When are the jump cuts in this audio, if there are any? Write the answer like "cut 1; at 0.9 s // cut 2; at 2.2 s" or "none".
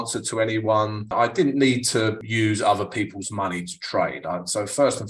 cut 1; at 1.1 s // cut 2; at 2.2 s